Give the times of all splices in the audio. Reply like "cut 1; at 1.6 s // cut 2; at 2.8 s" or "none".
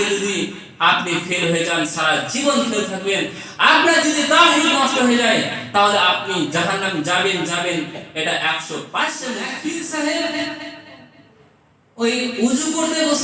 cut 1; at 9.5 s